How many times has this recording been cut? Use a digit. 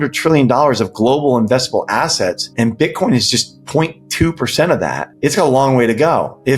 2